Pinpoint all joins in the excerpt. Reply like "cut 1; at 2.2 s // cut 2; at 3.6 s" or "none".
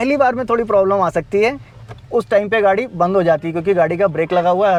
none